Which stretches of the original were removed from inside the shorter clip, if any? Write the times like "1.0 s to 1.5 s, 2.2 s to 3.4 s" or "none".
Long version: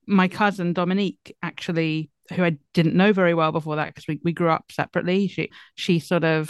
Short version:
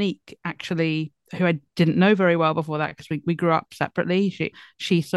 none